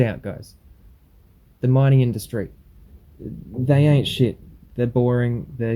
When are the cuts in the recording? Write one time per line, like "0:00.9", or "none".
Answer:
none

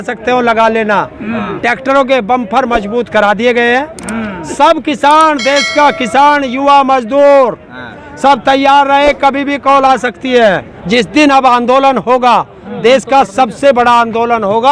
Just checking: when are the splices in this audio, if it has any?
0:10.7

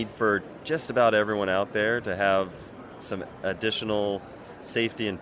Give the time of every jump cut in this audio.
none

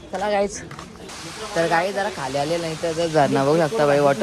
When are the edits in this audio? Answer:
0:01.0

